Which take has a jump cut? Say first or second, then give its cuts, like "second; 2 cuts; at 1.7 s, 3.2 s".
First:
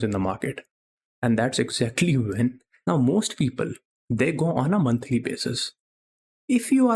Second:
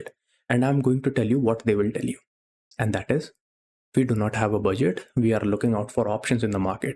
first; 1 cut; at 2.7 s